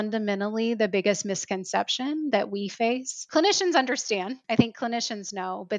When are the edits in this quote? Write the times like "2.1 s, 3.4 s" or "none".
3.2 s, 4.4 s